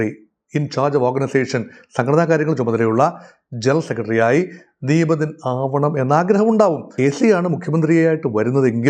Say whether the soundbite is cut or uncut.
cut